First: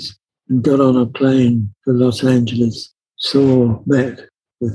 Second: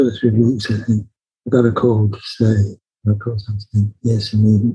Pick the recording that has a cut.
first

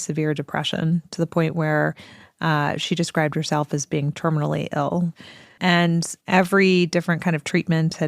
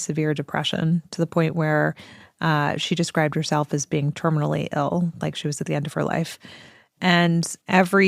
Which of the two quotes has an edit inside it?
first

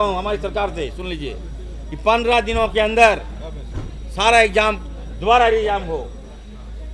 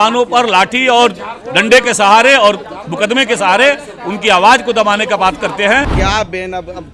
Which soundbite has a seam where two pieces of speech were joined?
second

